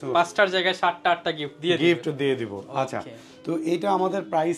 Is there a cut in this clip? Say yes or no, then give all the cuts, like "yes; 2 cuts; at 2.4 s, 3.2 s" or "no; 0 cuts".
no; 0 cuts